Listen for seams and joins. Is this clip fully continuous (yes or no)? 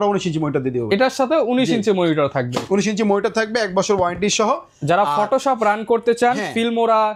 yes